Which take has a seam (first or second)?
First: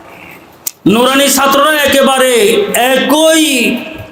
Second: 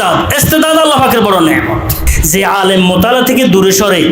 second